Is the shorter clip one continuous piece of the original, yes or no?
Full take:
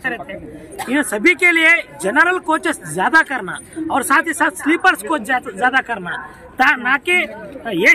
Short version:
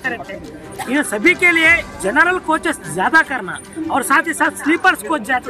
yes